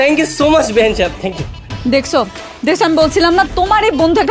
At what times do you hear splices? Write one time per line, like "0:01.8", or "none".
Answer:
none